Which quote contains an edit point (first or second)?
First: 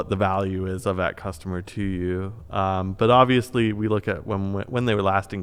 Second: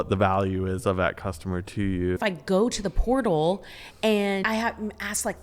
second